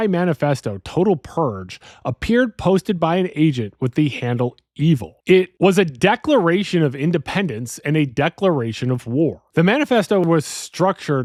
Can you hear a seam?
no; 0 cuts

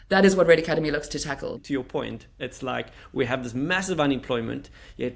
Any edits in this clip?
yes; 1 cut; at 1.6 s

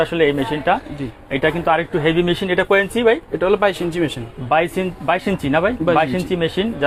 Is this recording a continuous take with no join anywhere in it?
yes; 0 cuts

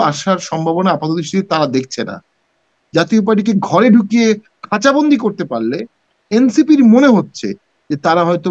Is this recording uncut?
no; 1 cut; at 2.7 s

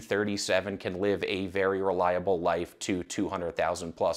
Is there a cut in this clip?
no; 0 cuts

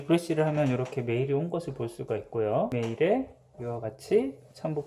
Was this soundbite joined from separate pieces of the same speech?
yes; 1 cut; at 2.7 s

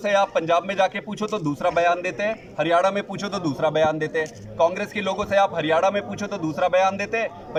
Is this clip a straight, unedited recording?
yes; 0 cuts

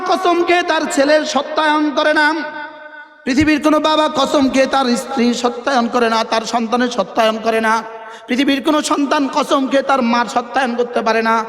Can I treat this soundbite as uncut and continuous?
yes; 0 cuts

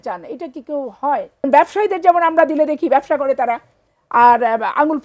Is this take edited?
yes; 1 cut; at 1.4 s

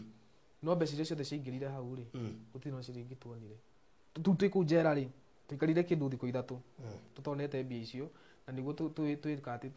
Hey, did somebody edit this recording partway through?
yes; 1 cut; at 4.1 s

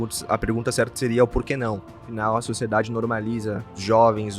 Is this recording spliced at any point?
yes; 1 cut; at 2.1 s

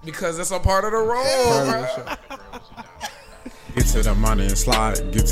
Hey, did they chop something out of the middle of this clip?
yes; 1 cut; at 3.8 s

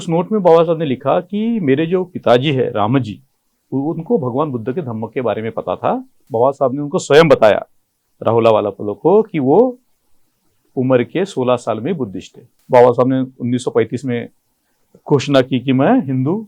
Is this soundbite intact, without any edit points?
no; 2 cuts; at 6.2 s, 12.5 s

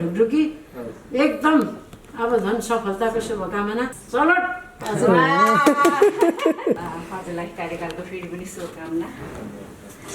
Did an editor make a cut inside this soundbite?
yes; 2 cuts; at 4.0 s, 6.8 s

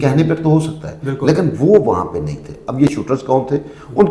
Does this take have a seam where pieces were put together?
no; 0 cuts

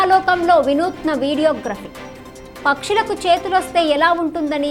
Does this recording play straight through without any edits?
yes; 0 cuts

